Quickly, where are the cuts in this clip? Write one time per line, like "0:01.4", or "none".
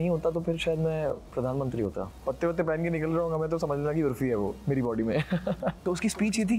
0:02.1
0:05.8